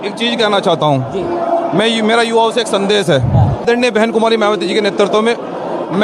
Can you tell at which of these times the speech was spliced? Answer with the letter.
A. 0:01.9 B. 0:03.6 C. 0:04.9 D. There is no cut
B